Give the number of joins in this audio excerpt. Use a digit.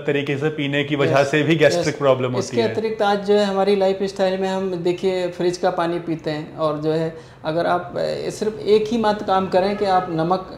0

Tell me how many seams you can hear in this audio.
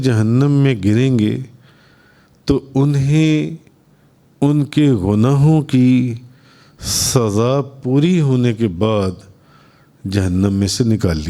0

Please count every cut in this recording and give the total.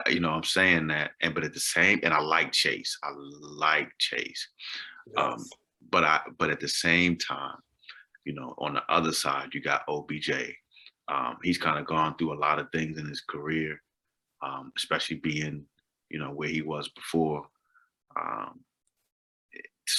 0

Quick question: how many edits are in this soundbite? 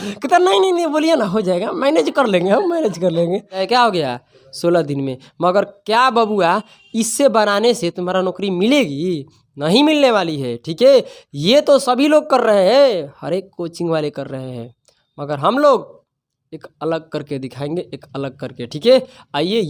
1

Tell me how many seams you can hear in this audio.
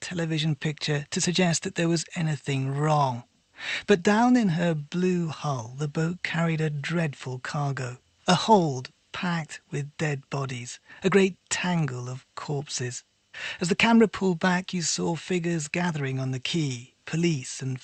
1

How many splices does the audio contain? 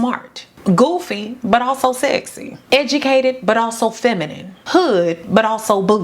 0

